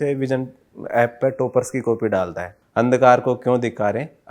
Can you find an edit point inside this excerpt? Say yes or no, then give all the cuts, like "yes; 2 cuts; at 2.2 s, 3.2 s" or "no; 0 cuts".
yes; 1 cut; at 2.5 s